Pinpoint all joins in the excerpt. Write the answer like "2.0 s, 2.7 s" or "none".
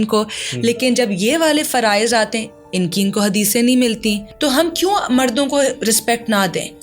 4.3 s